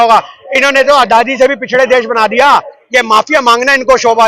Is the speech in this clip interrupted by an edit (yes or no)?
yes